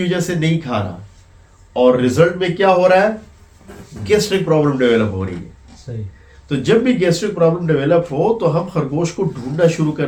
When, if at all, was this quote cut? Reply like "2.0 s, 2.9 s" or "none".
none